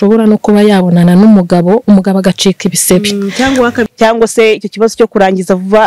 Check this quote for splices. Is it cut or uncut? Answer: cut